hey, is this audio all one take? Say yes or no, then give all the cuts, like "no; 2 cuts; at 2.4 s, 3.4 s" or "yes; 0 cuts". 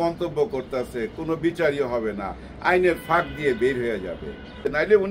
yes; 0 cuts